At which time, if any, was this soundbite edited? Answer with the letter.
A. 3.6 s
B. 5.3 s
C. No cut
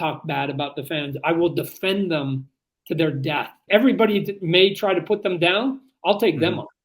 A